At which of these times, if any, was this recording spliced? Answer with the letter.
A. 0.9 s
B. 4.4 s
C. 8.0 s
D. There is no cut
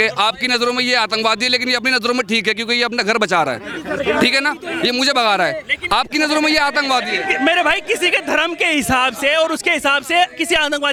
D